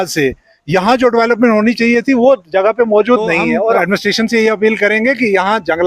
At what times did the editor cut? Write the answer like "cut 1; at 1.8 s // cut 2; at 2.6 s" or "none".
cut 1; at 3.8 s